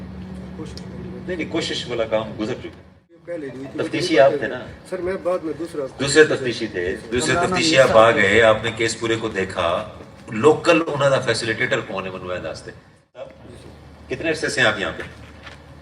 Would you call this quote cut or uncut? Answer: cut